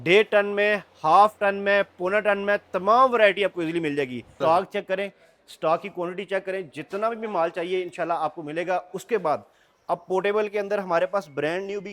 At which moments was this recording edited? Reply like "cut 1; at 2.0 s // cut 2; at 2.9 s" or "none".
cut 1; at 4.4 s